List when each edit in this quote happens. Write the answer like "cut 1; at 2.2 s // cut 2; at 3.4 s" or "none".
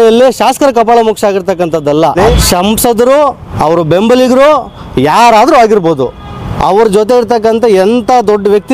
cut 1; at 2.3 s // cut 2; at 3.5 s